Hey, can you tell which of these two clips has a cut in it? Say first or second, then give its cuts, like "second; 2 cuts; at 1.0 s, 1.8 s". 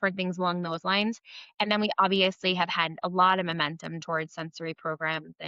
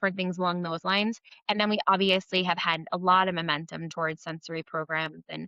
second; 1 cut; at 1.3 s